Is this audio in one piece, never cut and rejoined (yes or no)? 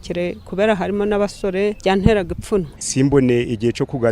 no